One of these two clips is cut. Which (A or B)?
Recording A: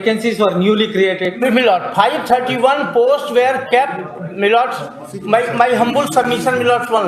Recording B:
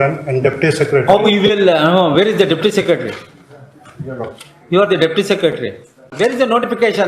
B